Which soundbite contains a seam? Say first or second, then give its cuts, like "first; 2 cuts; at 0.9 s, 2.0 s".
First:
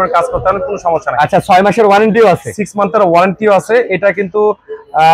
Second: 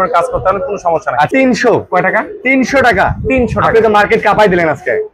second; 1 cut; at 1.3 s